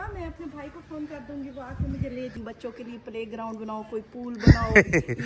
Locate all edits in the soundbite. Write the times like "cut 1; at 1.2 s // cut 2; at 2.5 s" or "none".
cut 1; at 2.3 s